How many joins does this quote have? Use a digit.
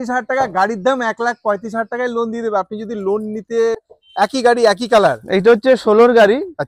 1